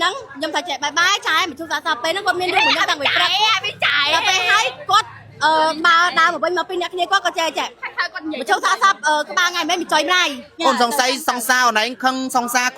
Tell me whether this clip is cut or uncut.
cut